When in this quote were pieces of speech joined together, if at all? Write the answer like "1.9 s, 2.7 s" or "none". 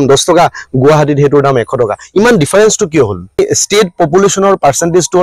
3.4 s